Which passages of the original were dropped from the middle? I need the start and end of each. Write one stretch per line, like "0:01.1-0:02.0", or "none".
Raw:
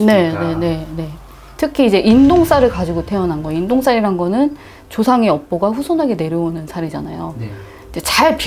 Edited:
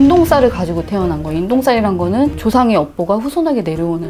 0:04.6-0:04.9